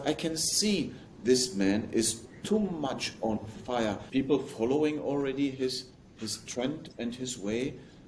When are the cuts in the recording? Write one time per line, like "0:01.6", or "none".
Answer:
0:04.0